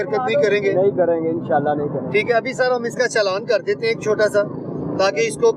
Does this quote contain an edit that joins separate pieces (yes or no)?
no